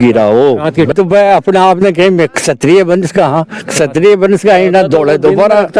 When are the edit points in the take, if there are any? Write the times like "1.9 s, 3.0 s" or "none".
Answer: 0.9 s

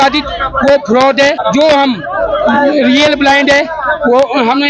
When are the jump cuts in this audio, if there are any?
1.4 s

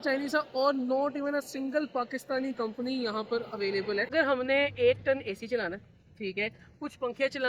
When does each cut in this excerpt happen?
4.1 s

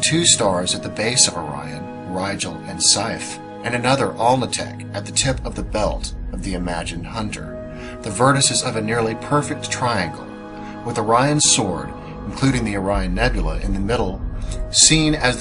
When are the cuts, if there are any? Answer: 6.1 s

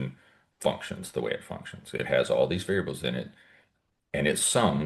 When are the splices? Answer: none

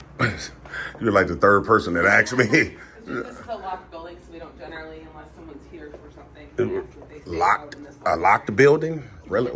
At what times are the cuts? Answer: none

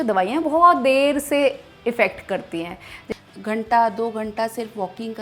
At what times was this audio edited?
3.0 s

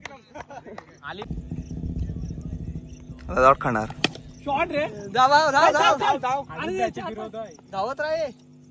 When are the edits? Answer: none

